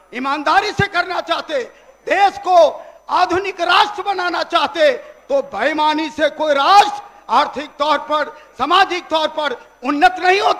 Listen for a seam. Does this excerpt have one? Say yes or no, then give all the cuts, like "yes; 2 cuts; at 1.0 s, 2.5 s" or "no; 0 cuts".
no; 0 cuts